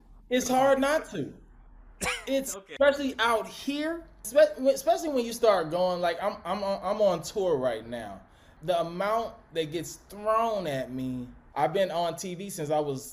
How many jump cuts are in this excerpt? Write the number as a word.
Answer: four